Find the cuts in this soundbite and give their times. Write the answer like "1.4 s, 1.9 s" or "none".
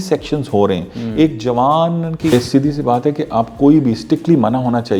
2.3 s